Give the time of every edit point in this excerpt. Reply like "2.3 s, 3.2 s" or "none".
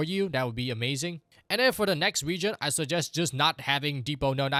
none